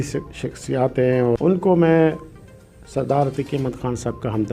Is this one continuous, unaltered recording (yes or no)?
no